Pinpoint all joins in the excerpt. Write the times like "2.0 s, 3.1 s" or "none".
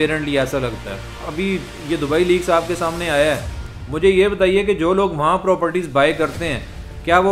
1.3 s